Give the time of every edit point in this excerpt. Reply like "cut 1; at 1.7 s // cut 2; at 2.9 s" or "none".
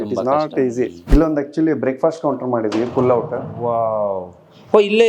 cut 1; at 1.1 s